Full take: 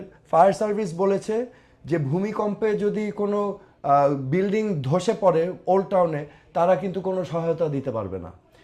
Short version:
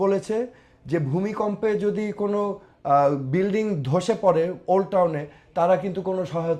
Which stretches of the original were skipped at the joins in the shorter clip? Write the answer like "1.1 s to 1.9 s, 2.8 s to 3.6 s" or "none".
none